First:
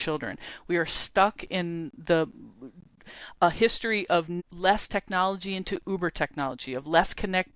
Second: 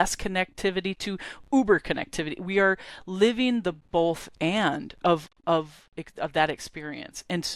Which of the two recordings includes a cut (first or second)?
first